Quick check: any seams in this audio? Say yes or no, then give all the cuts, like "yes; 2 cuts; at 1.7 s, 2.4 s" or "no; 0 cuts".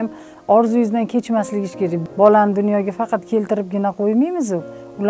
yes; 1 cut; at 2.0 s